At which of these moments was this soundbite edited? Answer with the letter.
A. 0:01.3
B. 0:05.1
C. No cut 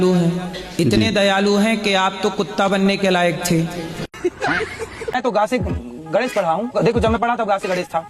B